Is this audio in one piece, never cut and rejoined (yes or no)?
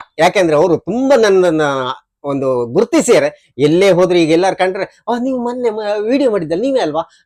yes